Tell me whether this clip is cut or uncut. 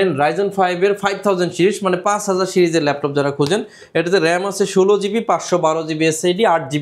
uncut